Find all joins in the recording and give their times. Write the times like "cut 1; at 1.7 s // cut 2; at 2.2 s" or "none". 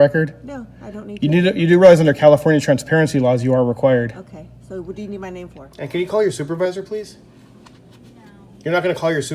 cut 1; at 5.6 s